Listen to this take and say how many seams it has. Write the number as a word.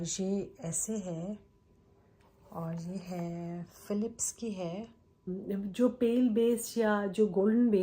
one